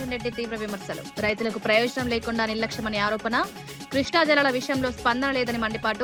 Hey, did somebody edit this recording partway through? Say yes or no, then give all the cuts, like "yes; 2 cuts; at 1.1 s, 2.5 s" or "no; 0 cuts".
no; 0 cuts